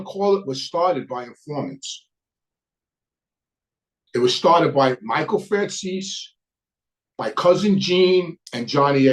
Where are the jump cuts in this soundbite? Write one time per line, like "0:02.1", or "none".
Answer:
none